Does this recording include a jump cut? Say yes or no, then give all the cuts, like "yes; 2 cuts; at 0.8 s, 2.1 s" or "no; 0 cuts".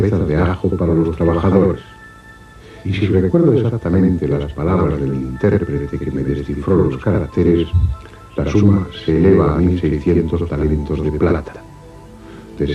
no; 0 cuts